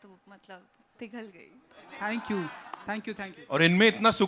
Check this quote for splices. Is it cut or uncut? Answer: uncut